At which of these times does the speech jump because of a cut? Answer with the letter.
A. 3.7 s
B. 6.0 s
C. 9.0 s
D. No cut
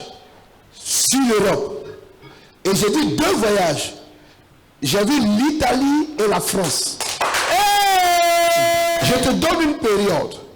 C